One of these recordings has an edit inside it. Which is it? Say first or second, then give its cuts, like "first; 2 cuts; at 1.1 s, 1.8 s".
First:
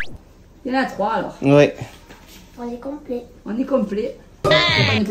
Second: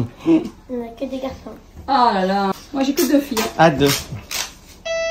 second; 1 cut; at 2.5 s